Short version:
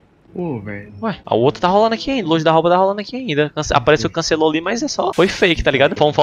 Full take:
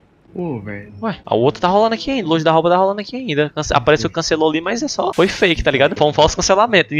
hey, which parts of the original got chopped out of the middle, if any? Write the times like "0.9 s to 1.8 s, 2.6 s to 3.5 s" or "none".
none

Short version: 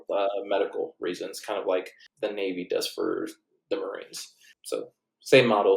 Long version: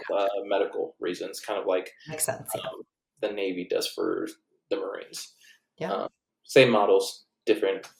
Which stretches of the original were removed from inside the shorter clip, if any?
2.0 s to 3.0 s, 5.8 s to 6.0 s

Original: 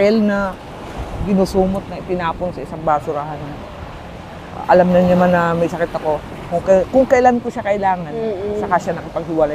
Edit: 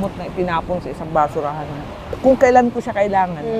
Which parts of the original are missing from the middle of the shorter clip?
3.9 s to 6.9 s

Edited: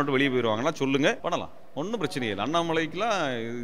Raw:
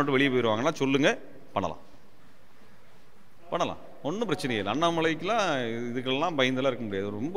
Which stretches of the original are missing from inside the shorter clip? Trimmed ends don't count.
1.2 s to 3.5 s

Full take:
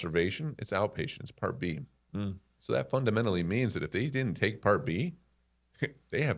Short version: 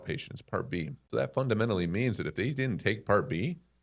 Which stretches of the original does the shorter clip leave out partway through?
1.9 s to 2.5 s

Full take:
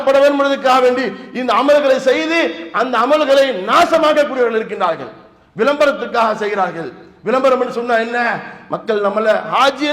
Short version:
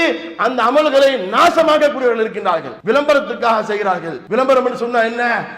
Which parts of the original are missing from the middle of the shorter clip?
5.1 s to 5.4 s, 6.9 s to 7.1 s

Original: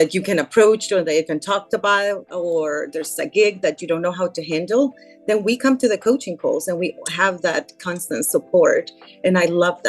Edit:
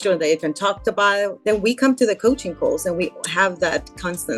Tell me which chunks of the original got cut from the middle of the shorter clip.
2.2 s to 5.2 s

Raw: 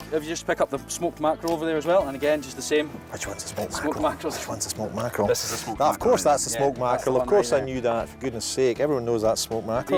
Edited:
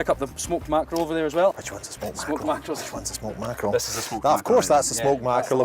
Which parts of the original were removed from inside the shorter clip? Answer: 2.1 s to 3.1 s

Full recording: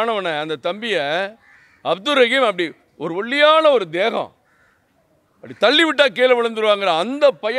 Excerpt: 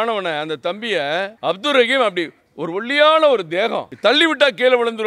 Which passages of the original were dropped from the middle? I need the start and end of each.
1.3 s to 1.8 s, 4.3 s to 5.5 s

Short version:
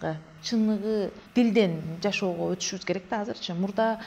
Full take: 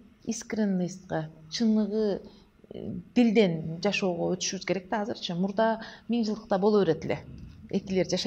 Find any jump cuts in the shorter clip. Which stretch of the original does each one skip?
2.3 s to 3.0 s

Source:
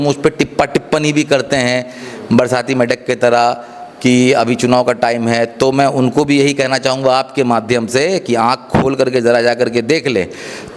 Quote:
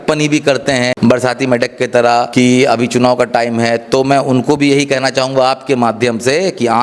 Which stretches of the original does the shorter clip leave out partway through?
1.8 s to 2.2 s, 3.6 s to 4.0 s

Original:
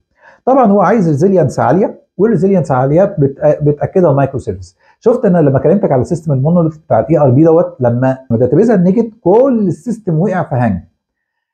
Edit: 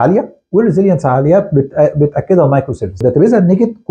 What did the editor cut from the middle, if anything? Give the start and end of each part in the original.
4.6 s to 8.3 s

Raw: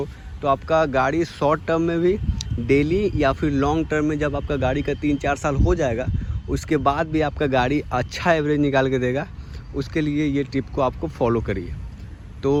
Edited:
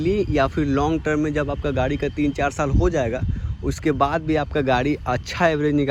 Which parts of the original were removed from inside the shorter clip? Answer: none

